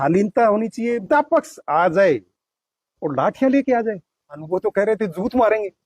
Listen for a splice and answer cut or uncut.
cut